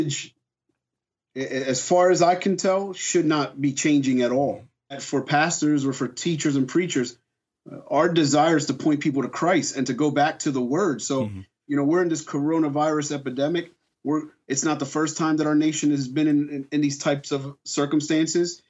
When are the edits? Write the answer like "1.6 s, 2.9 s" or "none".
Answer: 5.0 s